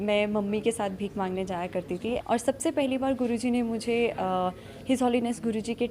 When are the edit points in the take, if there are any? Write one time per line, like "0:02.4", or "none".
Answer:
0:02.2